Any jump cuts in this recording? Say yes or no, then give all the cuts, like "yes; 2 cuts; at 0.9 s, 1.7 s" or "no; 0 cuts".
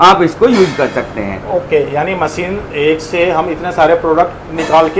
no; 0 cuts